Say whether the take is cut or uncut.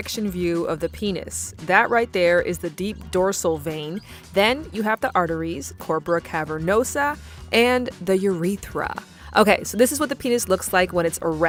uncut